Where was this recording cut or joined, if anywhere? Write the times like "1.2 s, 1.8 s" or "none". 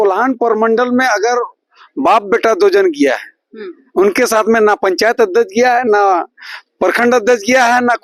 none